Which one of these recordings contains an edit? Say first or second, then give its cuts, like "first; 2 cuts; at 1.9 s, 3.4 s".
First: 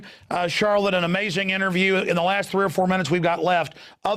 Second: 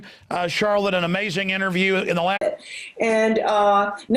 first; 1 cut; at 2.4 s